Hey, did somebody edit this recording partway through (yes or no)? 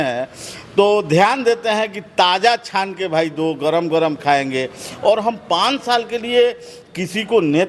no